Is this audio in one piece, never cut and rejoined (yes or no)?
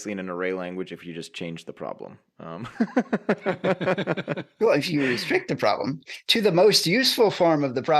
yes